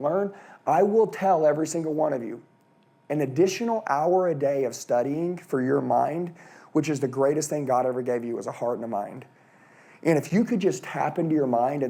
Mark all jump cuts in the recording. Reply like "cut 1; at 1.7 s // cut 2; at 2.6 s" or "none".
none